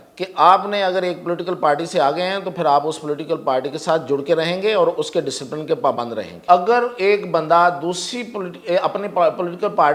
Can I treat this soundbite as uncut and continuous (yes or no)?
no